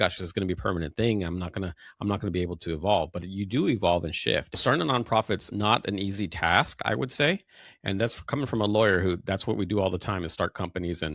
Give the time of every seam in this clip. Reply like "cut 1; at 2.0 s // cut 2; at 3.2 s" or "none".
cut 1; at 4.6 s // cut 2; at 5.5 s